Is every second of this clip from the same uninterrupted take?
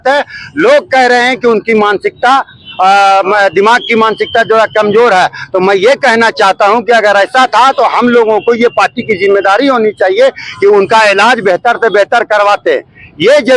yes; 0 cuts

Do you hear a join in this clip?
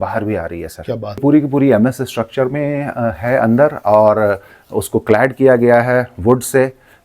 yes; 1 cut; at 1.2 s

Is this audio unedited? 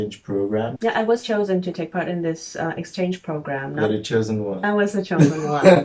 yes; 0 cuts

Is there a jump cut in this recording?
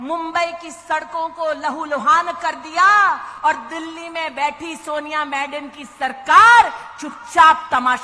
no; 0 cuts

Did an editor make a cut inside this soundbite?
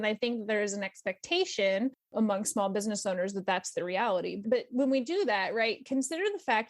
no; 0 cuts

